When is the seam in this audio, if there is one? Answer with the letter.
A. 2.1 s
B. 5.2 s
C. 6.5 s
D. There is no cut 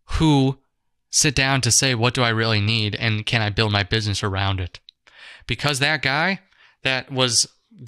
D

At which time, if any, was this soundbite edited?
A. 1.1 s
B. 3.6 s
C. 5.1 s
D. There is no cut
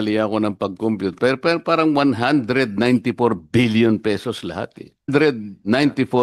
C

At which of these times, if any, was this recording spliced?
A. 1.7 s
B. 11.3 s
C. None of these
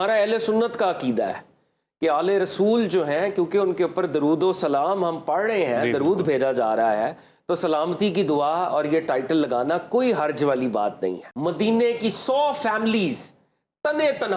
B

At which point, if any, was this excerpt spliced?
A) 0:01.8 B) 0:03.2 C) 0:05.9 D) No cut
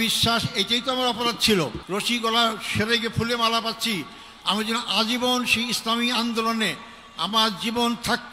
A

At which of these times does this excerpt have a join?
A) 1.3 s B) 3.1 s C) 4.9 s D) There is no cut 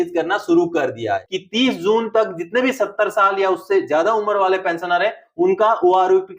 A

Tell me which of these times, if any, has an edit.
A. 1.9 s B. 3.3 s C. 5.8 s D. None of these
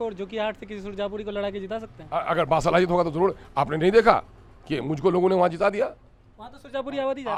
D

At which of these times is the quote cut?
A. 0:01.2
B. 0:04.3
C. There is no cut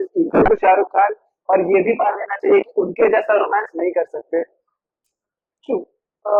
C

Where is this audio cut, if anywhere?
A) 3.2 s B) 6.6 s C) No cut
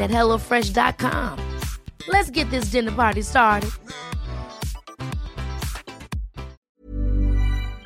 B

